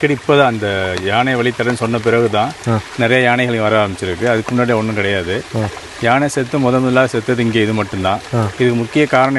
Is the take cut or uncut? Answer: uncut